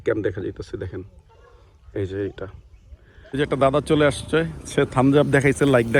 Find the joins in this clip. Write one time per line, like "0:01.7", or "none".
0:03.4